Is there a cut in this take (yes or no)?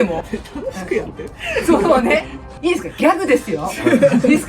yes